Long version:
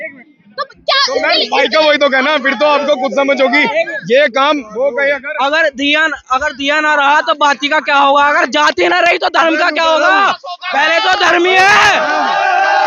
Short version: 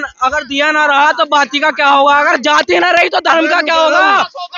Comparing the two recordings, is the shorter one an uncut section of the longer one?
yes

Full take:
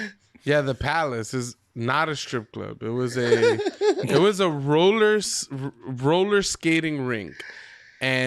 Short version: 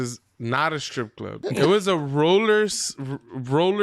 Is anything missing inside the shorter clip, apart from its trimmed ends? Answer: yes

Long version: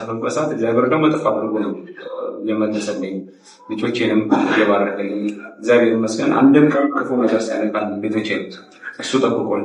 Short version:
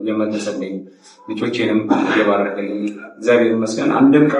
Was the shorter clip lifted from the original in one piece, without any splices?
yes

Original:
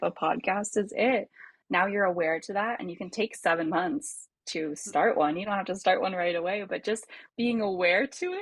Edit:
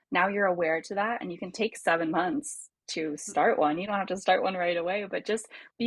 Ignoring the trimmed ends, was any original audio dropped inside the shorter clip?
no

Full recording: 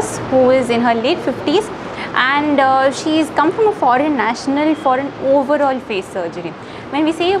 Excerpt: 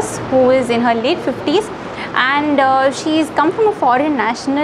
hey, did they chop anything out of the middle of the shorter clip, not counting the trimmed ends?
no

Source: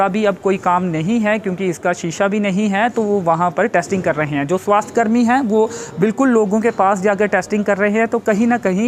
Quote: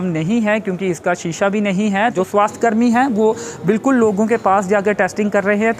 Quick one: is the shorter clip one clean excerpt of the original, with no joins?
no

